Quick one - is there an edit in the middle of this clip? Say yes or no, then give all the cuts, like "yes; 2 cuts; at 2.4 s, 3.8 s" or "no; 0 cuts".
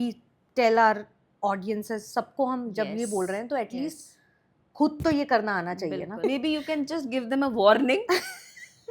yes; 1 cut; at 6.2 s